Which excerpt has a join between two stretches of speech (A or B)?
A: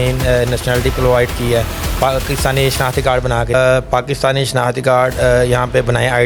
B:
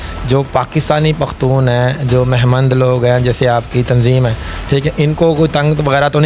A